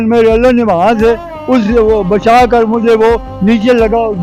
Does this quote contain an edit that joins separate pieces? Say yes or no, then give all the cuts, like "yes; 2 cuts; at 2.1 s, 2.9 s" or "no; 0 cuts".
no; 0 cuts